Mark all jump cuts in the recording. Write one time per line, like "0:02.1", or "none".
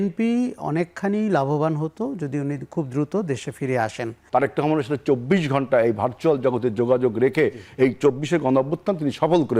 0:04.2